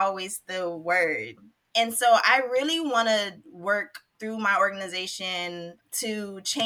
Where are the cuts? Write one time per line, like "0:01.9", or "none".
0:01.3
0:04.1
0:05.7